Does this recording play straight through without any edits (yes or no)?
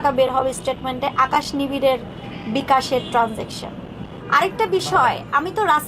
no